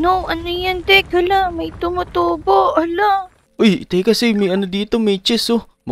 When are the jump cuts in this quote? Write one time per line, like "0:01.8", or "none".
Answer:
0:03.4